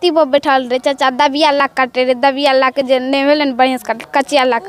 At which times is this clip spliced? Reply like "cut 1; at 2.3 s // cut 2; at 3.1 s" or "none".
none